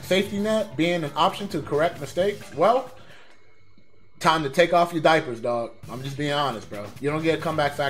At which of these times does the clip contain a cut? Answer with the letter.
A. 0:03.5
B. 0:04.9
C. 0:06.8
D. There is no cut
C